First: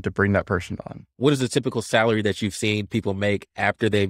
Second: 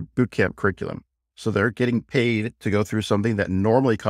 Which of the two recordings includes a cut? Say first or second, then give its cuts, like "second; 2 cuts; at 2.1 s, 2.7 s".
first; 1 cut; at 1.0 s